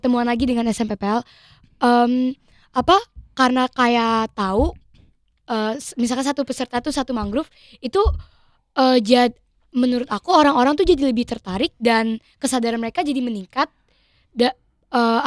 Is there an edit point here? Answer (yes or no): no